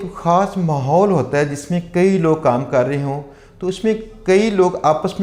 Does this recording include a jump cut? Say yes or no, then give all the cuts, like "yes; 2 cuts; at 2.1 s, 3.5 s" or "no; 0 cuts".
no; 0 cuts